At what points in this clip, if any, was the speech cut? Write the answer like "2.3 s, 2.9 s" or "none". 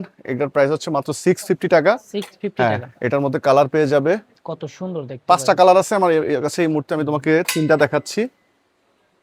none